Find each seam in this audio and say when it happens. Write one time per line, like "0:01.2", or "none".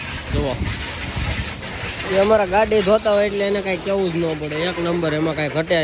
none